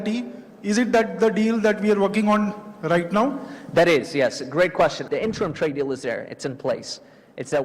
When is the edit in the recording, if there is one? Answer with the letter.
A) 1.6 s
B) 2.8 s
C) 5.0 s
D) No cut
C